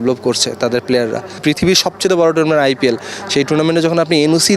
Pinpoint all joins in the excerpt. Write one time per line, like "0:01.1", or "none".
0:01.3